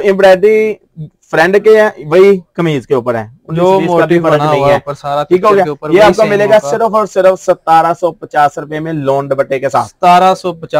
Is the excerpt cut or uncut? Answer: uncut